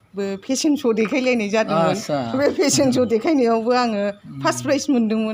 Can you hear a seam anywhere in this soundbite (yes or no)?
no